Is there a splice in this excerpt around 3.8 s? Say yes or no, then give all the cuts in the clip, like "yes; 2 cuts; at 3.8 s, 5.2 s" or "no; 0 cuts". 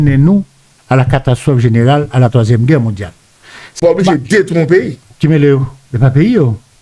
yes; 1 cut; at 3.8 s